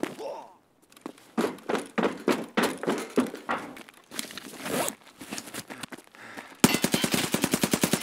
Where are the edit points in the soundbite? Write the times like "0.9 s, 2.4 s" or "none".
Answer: 3.7 s, 5.9 s